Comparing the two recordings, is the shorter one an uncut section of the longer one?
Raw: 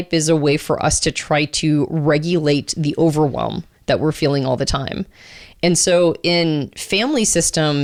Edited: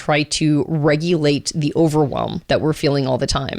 no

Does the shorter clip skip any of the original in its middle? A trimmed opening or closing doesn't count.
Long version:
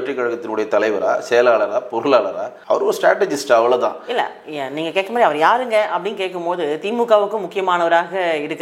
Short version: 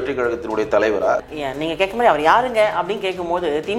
yes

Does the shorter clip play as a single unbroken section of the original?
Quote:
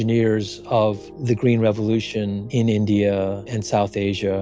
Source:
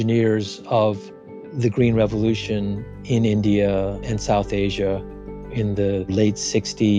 no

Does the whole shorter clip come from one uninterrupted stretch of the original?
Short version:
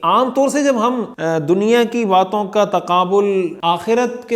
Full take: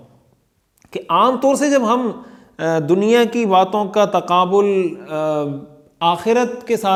no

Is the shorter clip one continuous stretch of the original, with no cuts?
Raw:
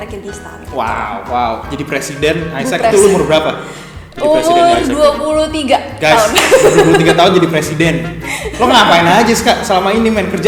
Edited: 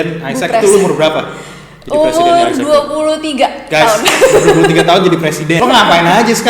no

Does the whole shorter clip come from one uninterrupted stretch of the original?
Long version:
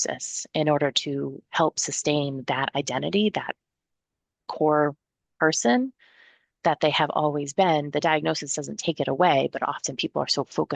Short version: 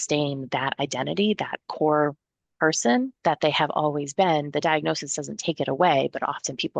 no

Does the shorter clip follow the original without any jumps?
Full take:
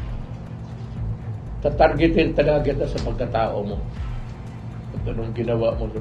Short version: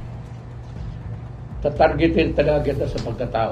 yes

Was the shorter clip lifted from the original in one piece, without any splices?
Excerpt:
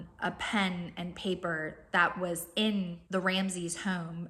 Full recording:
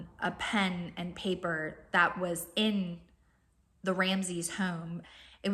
no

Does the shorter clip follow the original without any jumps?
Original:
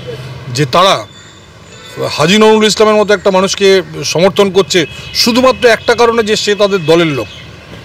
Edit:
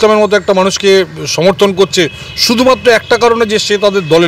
yes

